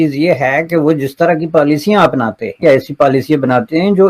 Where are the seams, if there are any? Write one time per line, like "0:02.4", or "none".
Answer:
0:02.6